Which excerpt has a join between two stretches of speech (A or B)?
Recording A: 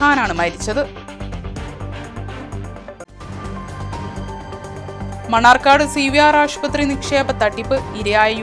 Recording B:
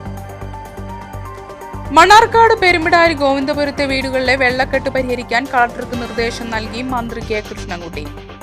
B